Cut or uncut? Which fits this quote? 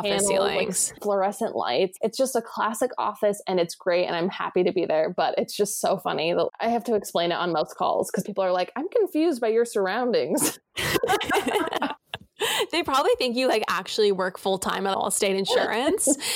cut